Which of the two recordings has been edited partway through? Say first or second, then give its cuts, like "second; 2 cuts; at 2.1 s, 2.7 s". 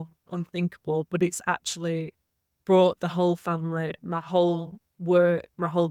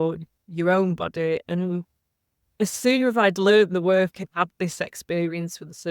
second; 2 cuts; at 1.5 s, 4.2 s